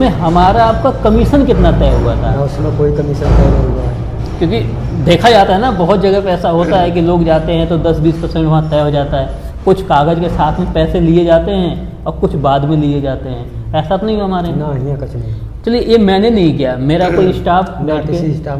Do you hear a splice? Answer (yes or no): no